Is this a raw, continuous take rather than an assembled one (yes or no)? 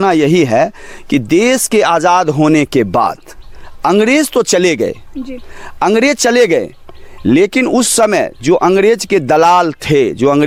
yes